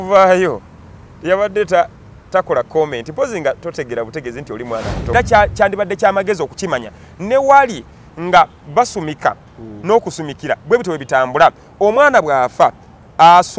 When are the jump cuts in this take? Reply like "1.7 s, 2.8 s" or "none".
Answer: 5.1 s